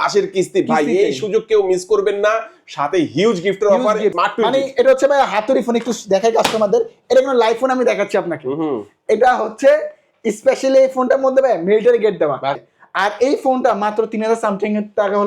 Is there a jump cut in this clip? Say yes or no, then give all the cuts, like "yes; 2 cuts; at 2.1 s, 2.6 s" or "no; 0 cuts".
yes; 2 cuts; at 4.1 s, 12.6 s